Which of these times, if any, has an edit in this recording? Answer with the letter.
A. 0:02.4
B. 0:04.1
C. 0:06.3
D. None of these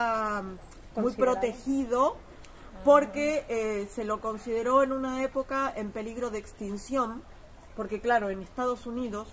D